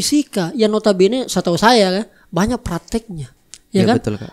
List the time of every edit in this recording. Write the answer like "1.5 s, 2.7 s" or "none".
none